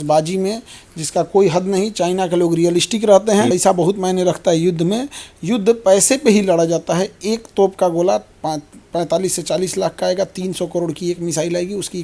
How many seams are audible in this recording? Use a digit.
1